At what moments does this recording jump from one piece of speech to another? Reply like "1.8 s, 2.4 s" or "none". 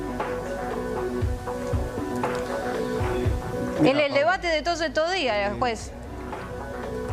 none